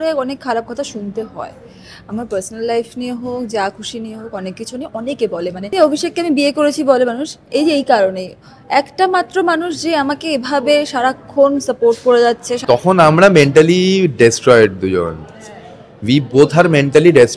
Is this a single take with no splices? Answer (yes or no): no